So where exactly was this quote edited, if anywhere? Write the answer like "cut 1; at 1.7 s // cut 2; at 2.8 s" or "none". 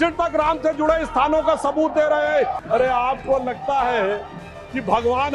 cut 1; at 2.6 s